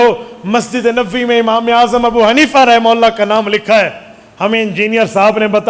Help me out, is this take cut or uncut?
uncut